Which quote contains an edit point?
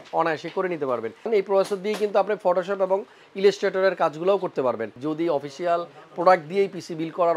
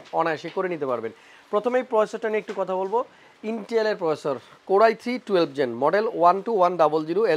first; 2 cuts; at 1.3 s, 5.0 s

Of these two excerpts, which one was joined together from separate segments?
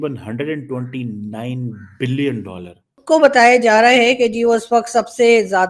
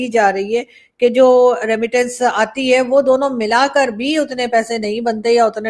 first; 1 cut; at 2.9 s

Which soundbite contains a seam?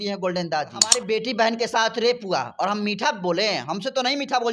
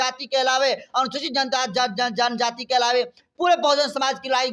first; 1 cut; at 0.9 s

